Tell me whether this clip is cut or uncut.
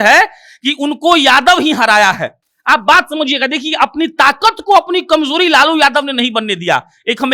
uncut